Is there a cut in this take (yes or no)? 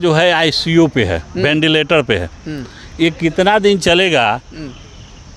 no